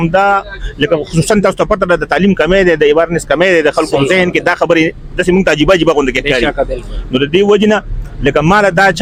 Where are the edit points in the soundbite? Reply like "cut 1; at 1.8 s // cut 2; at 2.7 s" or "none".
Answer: none